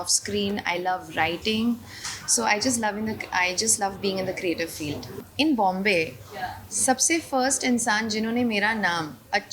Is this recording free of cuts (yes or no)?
no